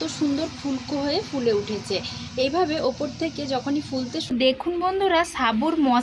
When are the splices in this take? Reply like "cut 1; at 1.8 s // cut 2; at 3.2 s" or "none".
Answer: cut 1; at 4.3 s